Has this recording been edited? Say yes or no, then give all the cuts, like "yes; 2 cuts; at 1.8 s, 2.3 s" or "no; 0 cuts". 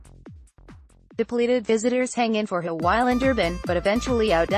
yes; 1 cut; at 1.3 s